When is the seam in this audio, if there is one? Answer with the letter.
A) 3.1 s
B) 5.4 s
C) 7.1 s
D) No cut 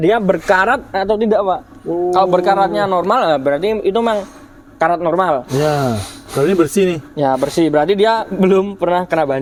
D